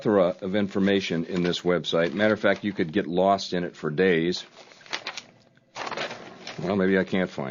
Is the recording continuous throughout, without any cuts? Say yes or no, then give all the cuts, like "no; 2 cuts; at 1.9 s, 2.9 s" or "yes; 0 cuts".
yes; 0 cuts